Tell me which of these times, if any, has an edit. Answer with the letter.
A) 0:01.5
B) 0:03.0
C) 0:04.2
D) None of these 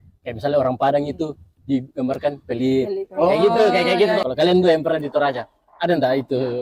C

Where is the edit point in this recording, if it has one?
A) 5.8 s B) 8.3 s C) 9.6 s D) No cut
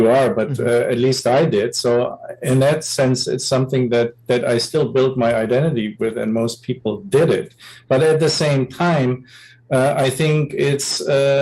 D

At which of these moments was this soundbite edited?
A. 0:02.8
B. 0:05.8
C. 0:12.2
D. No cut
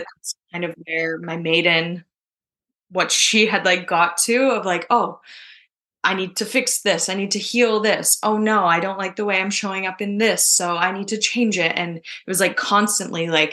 D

